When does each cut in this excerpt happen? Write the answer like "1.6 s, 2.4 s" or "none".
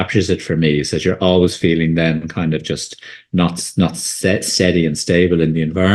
none